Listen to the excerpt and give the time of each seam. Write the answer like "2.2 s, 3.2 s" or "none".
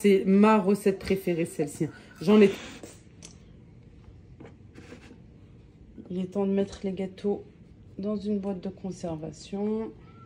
2.5 s